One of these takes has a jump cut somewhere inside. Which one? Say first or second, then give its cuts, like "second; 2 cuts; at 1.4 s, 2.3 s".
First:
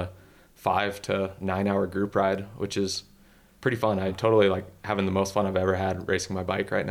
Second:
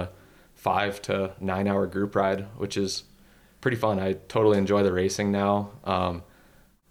first; 1 cut; at 4.1 s